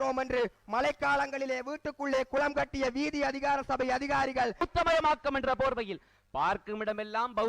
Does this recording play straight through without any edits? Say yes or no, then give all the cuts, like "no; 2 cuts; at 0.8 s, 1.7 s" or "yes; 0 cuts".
no; 1 cut; at 4.6 s